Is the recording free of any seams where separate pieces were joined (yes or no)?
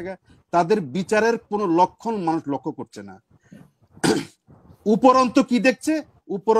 yes